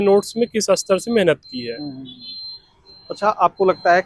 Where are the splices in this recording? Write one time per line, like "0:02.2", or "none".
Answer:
none